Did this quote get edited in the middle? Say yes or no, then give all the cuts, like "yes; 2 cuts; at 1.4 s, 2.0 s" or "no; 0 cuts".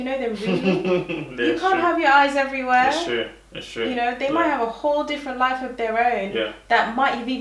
no; 0 cuts